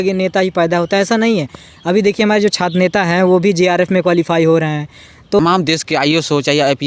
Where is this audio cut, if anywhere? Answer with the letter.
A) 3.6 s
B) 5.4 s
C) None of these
B